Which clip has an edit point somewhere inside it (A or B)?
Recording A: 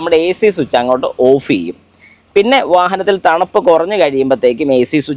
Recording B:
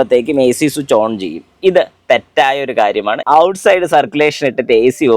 B